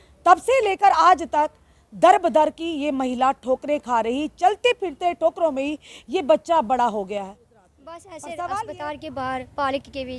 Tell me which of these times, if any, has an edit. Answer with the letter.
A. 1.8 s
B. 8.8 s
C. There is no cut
B